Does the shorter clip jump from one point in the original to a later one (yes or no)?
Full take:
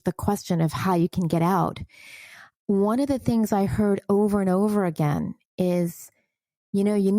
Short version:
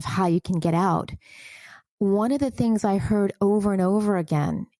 no